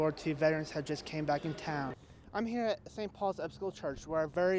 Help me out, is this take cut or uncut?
cut